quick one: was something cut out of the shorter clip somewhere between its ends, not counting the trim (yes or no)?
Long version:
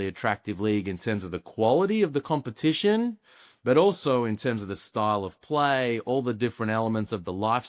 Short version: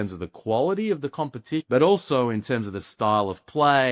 yes